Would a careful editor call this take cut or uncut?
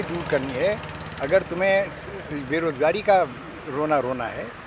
uncut